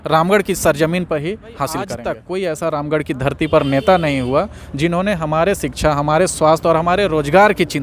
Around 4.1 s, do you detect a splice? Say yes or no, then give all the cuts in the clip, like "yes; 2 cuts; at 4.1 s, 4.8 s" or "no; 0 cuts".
no; 1 cut; at 2.0 s